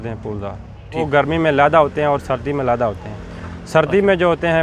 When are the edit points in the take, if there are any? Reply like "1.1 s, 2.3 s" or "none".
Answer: 1.0 s